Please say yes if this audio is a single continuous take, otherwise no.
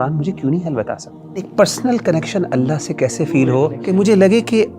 no